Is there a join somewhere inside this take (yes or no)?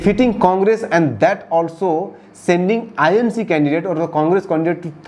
no